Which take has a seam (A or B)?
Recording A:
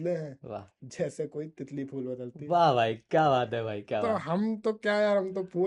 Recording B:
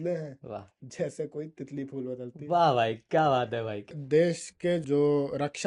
B